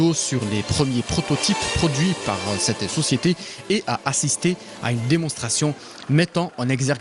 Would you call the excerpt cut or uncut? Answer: cut